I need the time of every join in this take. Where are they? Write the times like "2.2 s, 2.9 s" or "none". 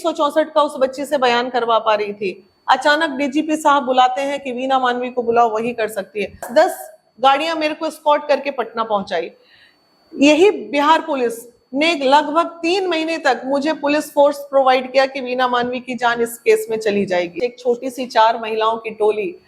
6.4 s, 17.4 s